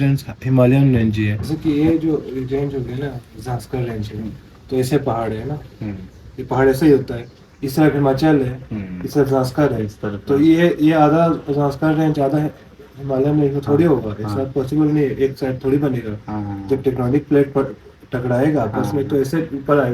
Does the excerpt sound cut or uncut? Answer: cut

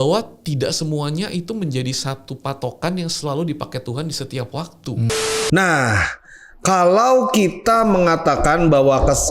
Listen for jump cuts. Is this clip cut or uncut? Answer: cut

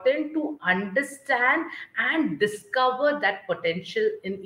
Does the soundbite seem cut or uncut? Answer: uncut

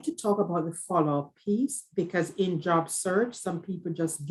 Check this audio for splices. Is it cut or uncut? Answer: uncut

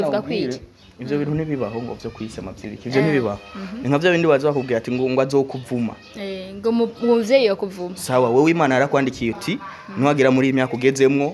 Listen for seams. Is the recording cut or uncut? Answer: uncut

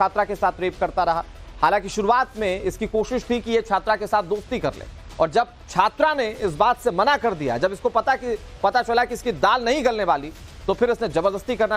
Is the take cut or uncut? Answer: cut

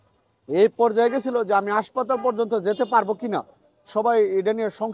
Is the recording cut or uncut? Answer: uncut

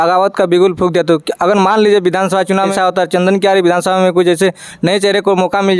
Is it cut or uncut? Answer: cut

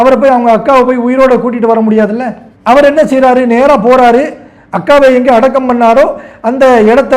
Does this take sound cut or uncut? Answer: uncut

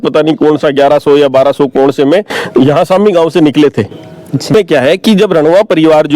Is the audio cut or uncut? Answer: cut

